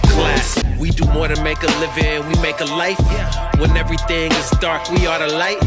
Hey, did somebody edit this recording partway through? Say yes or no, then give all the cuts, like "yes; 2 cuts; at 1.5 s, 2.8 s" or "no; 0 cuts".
no; 0 cuts